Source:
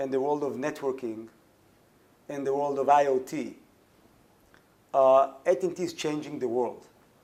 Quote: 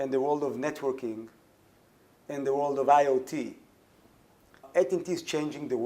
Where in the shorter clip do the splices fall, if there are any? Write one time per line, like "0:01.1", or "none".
0:04.6